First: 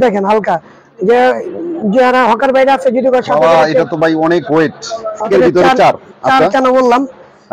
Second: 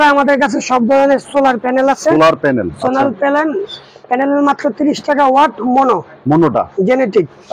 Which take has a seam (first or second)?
first